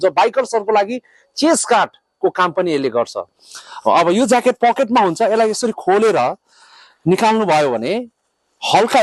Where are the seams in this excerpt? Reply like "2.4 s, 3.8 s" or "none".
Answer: none